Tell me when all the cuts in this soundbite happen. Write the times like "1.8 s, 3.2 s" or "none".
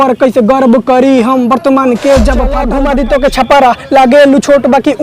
2.6 s